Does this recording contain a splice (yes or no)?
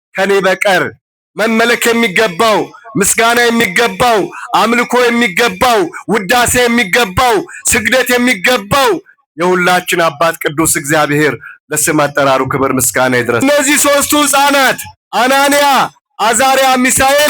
yes